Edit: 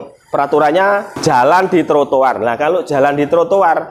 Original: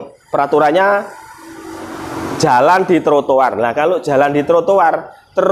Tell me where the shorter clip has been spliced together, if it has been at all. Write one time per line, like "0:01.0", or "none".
0:01.1